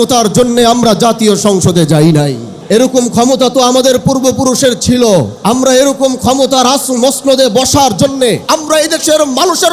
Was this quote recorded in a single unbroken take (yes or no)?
no